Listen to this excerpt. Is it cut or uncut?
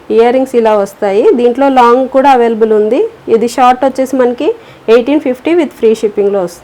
uncut